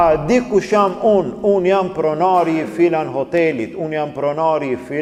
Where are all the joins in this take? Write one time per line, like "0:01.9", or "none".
none